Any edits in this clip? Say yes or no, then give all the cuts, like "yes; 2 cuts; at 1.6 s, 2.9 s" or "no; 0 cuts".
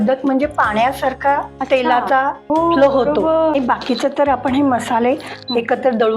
yes; 3 cuts; at 1.5 s, 2.4 s, 3.5 s